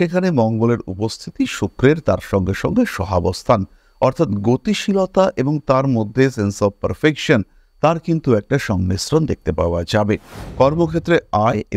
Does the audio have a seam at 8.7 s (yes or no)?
no